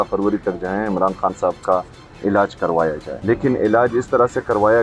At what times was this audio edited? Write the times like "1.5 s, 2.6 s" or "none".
3.1 s